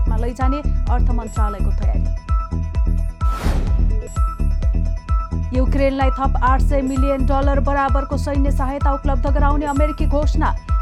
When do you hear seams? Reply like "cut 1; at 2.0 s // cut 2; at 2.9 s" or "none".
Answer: none

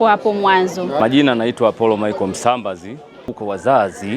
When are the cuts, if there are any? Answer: none

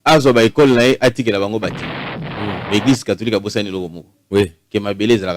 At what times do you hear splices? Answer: none

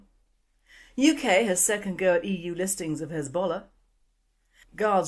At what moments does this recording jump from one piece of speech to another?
cut 1; at 1.3 s

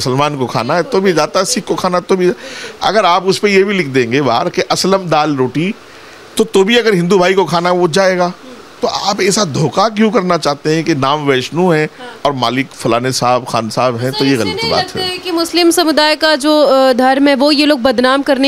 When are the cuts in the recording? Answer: none

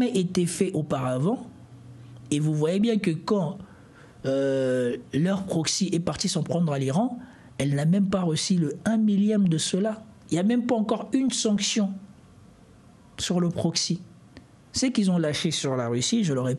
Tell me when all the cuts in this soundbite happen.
none

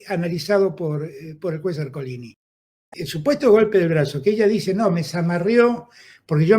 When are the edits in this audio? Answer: cut 1; at 2.7 s

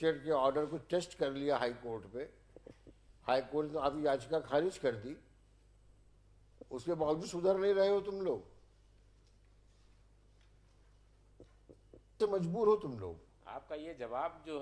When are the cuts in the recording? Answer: cut 1; at 12.2 s

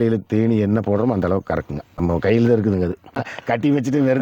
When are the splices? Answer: cut 1; at 1.8 s // cut 2; at 3.2 s

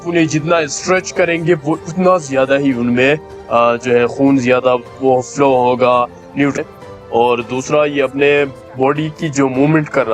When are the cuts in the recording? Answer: cut 1; at 6.6 s

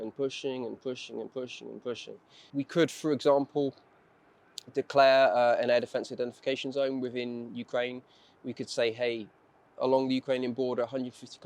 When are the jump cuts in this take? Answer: cut 1; at 2.4 s

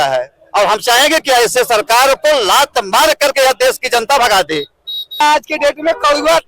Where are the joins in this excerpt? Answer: cut 1; at 5.2 s

